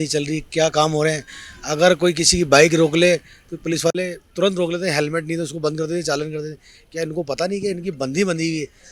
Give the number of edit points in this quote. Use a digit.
0